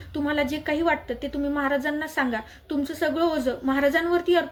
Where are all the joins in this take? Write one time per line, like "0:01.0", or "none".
none